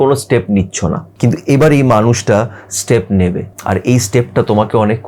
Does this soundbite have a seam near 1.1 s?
yes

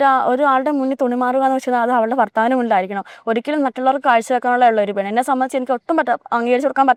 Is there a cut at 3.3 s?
no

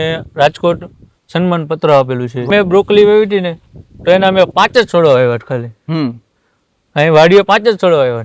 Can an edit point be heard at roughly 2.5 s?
yes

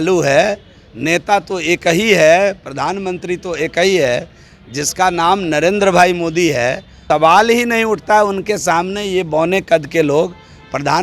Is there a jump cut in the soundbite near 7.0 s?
yes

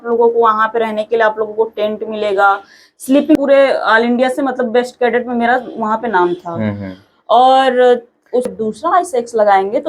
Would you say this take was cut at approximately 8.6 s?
yes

